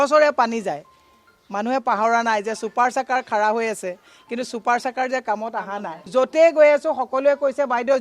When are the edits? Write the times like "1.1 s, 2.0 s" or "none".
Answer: 5.9 s